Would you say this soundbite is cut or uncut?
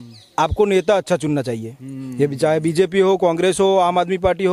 uncut